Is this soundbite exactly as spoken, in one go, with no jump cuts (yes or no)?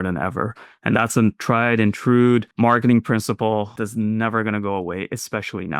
no